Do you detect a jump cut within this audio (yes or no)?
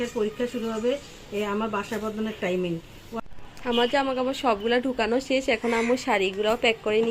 yes